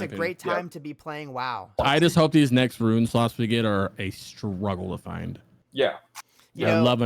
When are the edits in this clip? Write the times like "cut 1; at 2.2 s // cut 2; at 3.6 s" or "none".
cut 1; at 1.8 s